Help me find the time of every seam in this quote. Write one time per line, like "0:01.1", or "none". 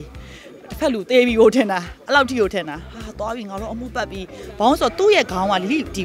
none